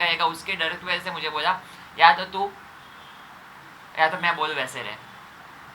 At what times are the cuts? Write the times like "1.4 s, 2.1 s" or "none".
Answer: none